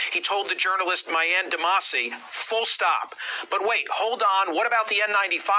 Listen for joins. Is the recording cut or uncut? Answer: cut